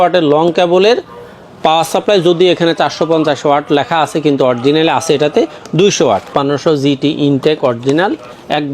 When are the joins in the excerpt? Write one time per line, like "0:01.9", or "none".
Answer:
0:06.3

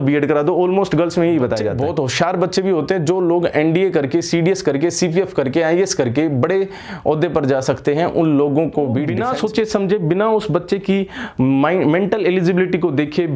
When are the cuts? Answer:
0:01.7
0:09.2

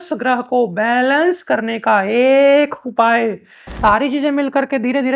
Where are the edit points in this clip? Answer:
0:03.7

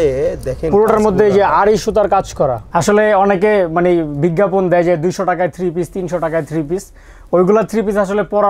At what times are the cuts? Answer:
0:02.6

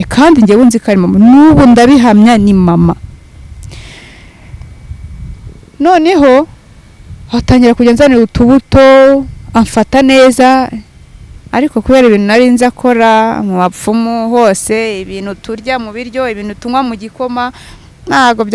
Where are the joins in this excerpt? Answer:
none

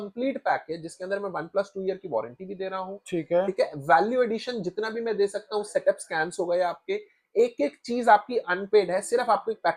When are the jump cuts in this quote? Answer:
none

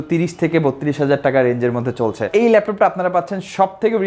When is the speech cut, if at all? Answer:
0:02.2

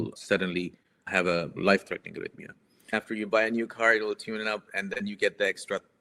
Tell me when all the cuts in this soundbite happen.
0:02.9

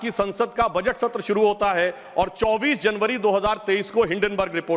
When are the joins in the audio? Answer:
none

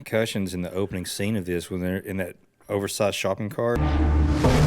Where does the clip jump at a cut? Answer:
0:03.8

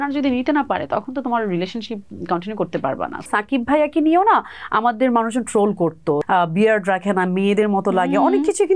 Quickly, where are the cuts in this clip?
0:03.3
0:06.2

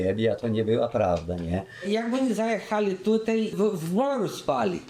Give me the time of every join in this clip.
0:01.7
0:03.5

